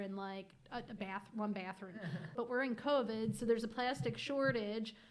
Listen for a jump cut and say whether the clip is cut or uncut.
cut